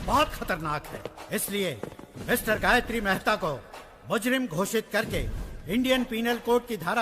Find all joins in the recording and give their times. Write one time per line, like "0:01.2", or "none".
none